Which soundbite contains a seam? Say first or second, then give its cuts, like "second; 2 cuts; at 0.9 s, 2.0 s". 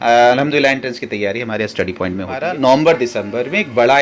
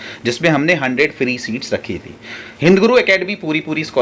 first; 1 cut; at 2.4 s